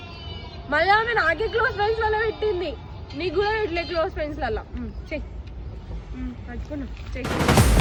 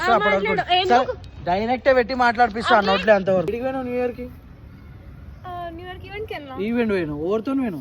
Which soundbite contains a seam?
second; 1 cut; at 3.5 s

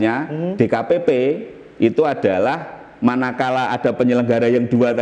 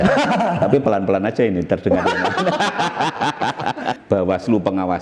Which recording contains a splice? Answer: second; 1 cut; at 3.9 s

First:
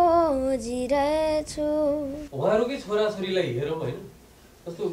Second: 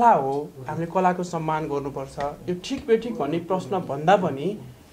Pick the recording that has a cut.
first; 1 cut; at 2.2 s

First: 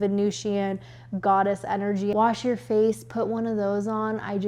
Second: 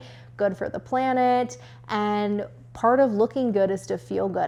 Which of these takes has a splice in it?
first; 1 cut; at 2.1 s

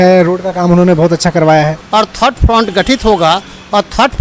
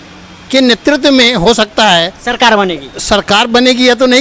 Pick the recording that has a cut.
first; 1 cut; at 1.8 s

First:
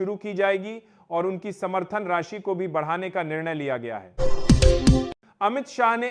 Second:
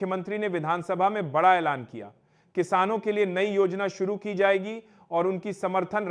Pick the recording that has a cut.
first; 2 cuts; at 4.0 s, 5.2 s

